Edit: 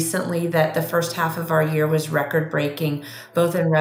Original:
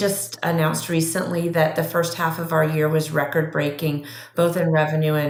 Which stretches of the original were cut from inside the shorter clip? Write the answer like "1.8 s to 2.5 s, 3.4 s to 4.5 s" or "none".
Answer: none